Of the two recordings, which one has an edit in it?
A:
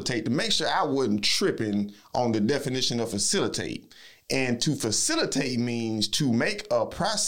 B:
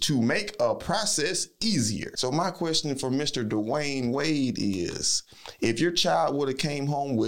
B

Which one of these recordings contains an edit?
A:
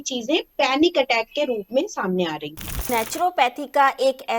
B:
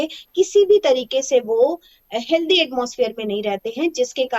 A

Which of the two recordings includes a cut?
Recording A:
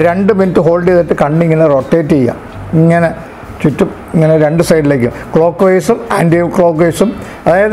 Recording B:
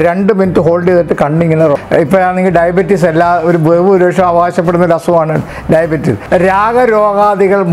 B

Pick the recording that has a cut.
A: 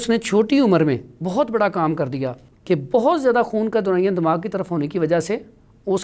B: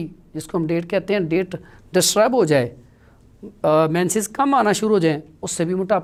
A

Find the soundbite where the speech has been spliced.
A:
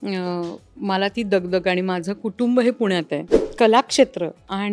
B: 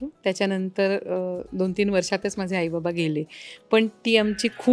A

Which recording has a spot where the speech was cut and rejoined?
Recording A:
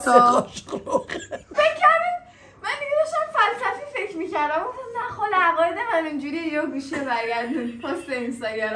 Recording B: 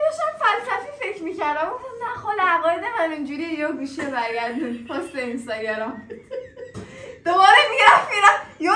A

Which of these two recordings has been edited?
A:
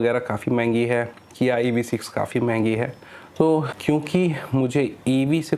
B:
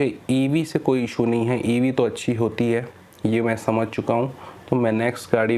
A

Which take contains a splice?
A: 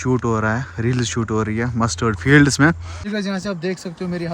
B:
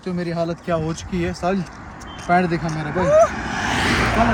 A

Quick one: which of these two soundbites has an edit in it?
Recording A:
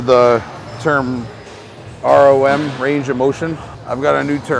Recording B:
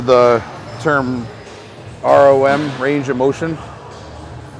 A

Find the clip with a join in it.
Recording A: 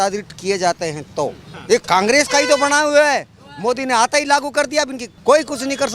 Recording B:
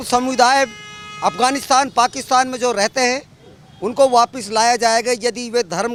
A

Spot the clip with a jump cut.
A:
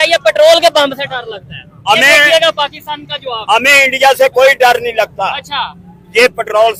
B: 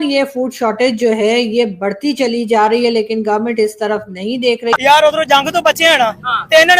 B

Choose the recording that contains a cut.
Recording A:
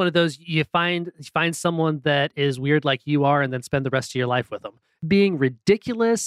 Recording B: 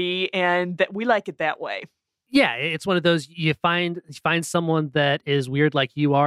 A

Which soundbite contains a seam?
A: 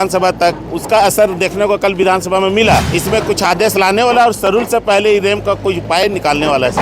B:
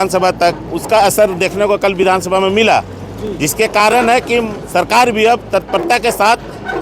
A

